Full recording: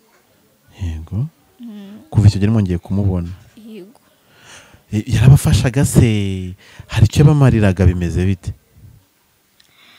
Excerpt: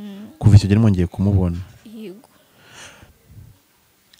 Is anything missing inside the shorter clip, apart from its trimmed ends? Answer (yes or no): yes